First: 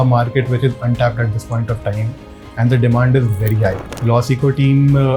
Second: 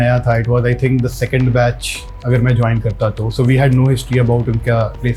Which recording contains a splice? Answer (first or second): first